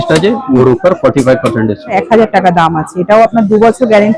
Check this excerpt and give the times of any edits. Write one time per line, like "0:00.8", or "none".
0:02.0

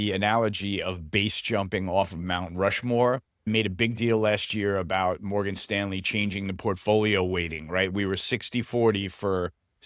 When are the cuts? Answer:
0:03.5

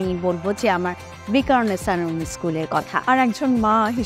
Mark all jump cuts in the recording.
0:02.9

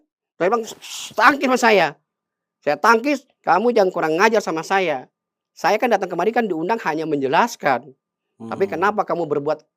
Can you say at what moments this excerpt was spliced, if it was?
0:03.3

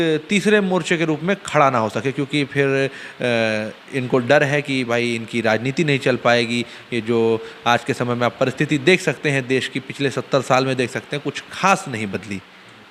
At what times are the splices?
none

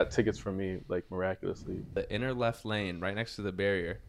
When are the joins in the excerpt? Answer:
0:01.9

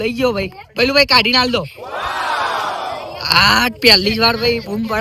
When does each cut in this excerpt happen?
none

